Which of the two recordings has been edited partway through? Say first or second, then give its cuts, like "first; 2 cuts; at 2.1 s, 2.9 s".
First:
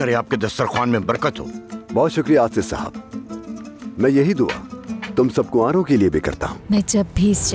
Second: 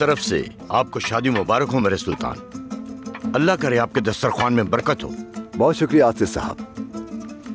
first; 1 cut; at 6.5 s